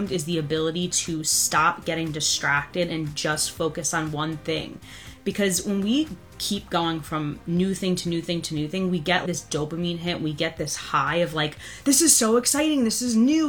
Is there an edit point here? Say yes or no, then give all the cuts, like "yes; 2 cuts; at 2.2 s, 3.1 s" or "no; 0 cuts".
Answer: yes; 1 cut; at 9.2 s